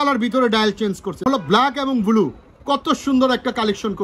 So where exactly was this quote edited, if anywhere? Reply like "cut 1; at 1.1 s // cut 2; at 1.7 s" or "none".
cut 1; at 1.2 s